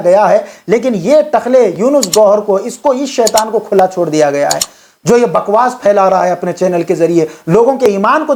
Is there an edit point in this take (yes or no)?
no